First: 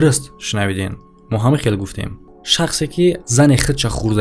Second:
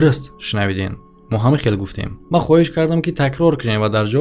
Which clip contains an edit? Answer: first; 1 cut; at 2.2 s

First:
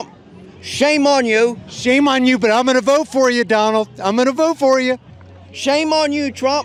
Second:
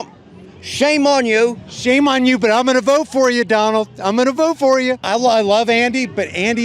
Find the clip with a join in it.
second; 1 cut; at 5.0 s

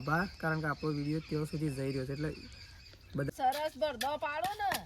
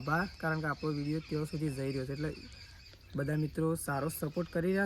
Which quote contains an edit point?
first; 1 cut; at 3.3 s

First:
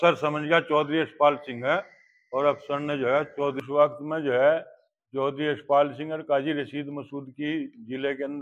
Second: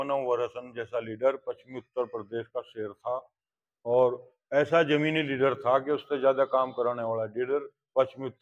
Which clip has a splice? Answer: first; 1 cut; at 3.6 s

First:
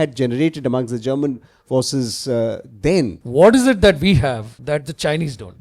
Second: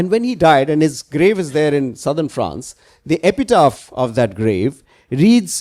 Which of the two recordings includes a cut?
first; 2 cuts; at 3.2 s, 4.5 s

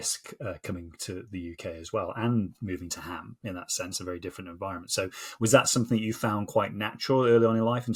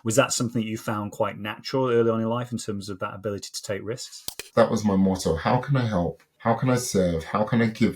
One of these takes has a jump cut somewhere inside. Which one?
second; 2 cuts; at 4.5 s, 6.2 s

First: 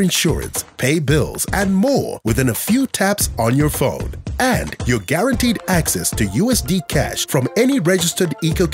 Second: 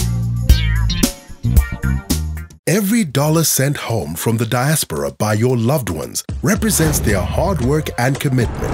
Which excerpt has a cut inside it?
second; 1 cut; at 2.4 s

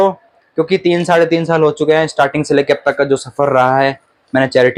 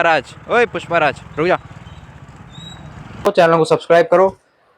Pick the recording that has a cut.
second; 1 cut; at 3.3 s

